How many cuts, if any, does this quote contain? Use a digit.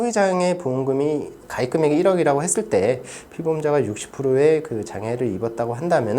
1